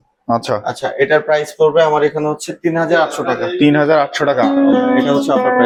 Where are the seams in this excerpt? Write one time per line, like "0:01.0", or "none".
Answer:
none